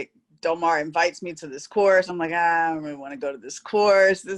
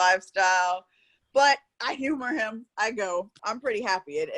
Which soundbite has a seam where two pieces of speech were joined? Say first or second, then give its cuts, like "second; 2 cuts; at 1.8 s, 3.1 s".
second; 1 cut; at 3.4 s